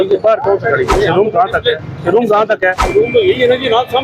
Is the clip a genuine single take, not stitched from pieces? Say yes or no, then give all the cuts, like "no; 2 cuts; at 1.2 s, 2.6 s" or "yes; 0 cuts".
no; 2 cuts; at 0.9 s, 2.8 s